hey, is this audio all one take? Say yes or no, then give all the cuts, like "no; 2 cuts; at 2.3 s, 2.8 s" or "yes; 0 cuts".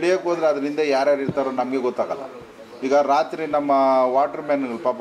yes; 0 cuts